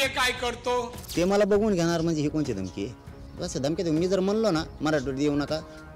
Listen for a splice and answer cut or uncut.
cut